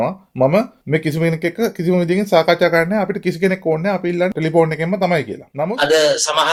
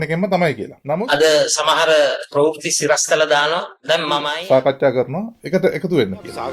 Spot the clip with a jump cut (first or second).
second